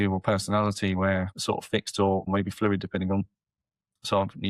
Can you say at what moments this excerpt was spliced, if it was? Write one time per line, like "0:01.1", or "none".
0:01.3
0:02.3